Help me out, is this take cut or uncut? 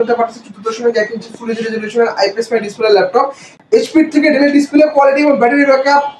cut